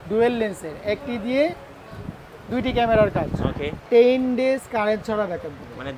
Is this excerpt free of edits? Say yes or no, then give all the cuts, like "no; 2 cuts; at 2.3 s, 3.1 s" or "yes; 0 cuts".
no; 1 cut; at 3.8 s